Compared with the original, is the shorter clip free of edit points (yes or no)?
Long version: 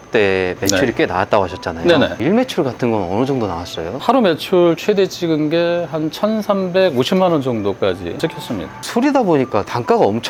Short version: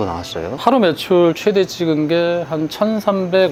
yes